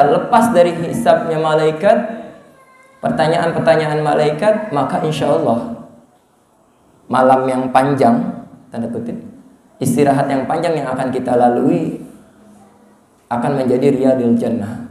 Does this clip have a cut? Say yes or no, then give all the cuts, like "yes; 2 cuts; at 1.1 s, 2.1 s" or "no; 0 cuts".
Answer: no; 0 cuts